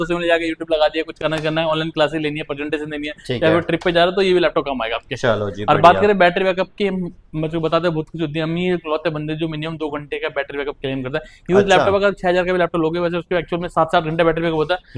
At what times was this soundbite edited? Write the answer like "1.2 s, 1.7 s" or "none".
none